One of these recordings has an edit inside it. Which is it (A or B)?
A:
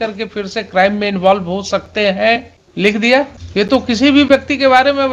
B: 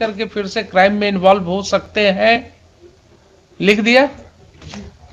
A